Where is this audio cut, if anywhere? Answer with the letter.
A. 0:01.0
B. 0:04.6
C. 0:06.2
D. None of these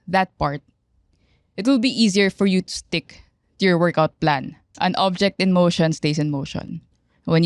B